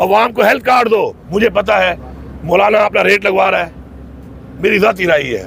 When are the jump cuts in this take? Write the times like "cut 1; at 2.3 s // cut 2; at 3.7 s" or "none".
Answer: cut 1; at 1.2 s